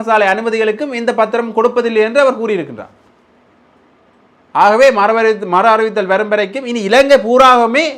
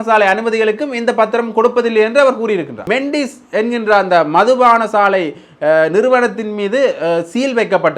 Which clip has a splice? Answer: second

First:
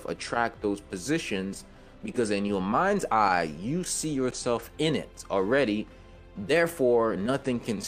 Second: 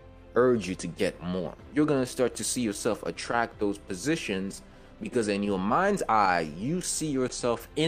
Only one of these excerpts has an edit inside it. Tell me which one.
second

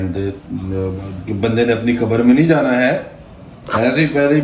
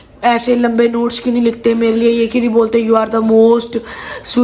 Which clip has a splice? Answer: first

